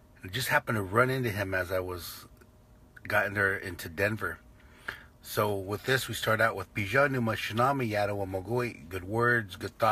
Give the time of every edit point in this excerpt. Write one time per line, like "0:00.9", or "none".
0:05.7

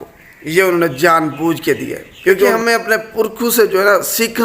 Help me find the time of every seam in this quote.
0:02.5

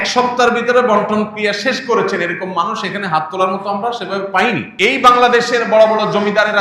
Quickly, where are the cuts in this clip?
0:04.7

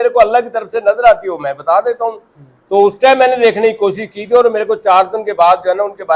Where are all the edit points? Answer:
none

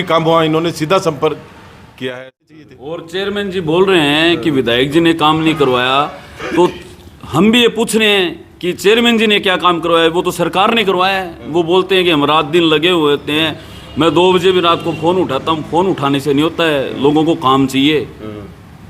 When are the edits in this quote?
0:02.6

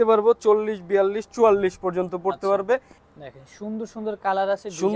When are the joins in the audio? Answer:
0:02.9

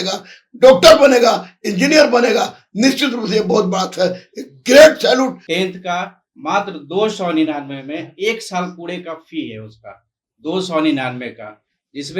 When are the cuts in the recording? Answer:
0:05.4

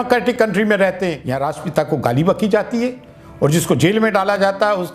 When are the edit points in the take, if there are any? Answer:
0:01.3

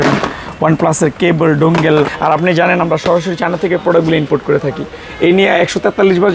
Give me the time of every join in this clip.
0:02.1

